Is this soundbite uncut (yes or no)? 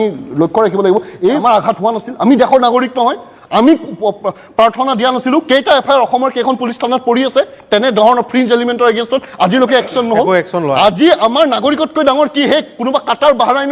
no